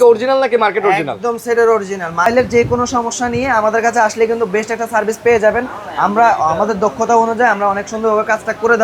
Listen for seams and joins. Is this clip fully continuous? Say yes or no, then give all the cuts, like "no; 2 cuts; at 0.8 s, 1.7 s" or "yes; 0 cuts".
no; 1 cut; at 2.3 s